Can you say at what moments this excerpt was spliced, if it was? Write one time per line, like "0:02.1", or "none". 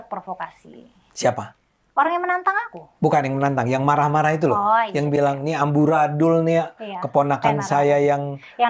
none

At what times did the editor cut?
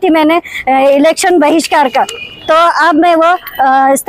none

